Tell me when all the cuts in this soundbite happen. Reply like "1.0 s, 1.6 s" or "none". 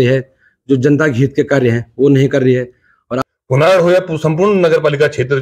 3.1 s